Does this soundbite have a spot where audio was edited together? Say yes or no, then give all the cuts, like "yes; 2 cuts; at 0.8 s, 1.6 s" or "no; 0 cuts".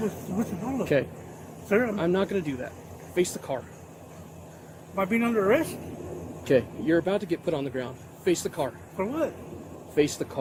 no; 0 cuts